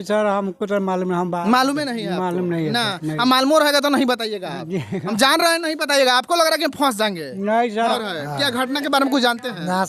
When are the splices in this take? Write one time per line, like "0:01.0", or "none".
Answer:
0:08.0